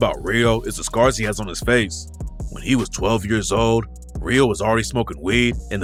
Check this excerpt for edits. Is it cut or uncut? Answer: uncut